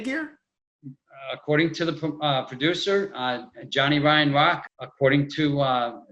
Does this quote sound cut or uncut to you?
cut